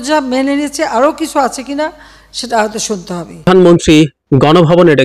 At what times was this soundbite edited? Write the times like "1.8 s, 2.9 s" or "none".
3.5 s